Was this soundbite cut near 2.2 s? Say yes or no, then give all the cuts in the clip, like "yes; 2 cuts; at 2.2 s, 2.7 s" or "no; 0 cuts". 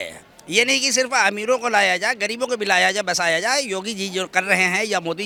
no; 0 cuts